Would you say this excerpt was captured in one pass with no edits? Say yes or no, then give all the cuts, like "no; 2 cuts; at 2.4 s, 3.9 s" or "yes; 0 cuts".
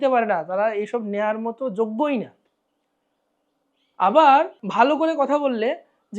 no; 1 cut; at 4.6 s